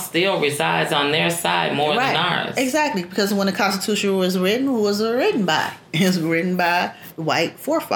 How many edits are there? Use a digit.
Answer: 1